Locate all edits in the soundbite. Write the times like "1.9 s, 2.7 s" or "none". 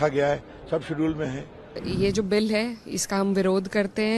1.8 s